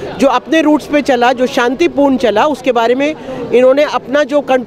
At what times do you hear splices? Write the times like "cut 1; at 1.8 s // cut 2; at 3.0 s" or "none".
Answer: none